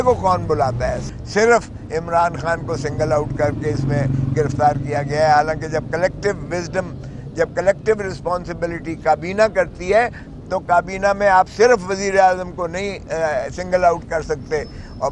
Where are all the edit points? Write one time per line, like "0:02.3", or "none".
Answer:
0:01.0